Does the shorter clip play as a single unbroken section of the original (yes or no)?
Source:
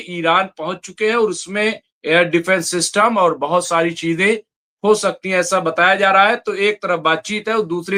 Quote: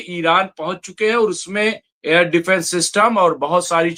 yes